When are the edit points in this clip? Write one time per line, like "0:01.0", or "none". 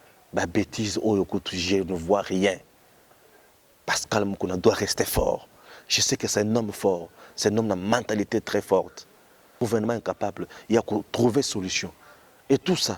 0:09.6